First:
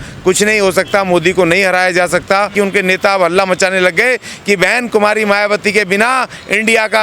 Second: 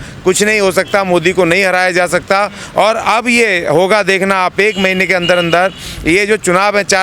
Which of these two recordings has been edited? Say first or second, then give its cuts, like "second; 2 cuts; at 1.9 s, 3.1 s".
first; 1 cut; at 2.5 s